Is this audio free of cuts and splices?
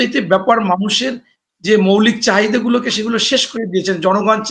yes; 0 cuts

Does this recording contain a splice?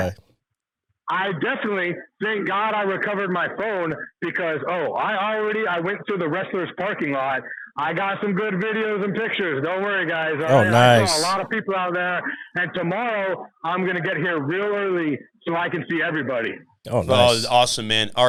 no; 0 cuts

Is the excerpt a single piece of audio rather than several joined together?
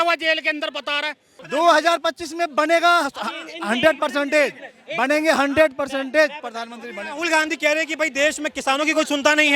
no; 1 cut; at 1.3 s

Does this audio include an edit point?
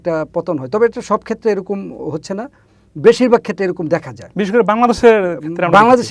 no; 0 cuts

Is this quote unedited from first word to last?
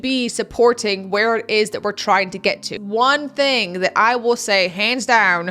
no; 1 cut; at 2.7 s

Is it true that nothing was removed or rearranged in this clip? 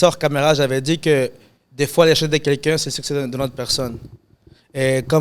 yes; 0 cuts

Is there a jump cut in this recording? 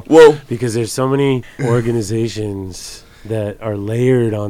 yes; 1 cut; at 1.6 s

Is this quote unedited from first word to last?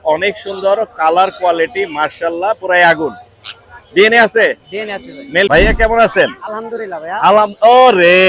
no; 1 cut; at 5.5 s

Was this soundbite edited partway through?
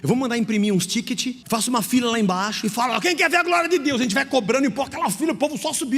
yes; 1 cut; at 1.4 s

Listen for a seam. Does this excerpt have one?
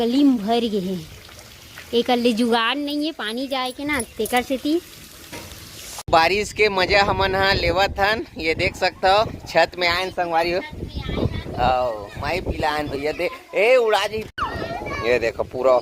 yes; 2 cuts; at 6.1 s, 14.3 s

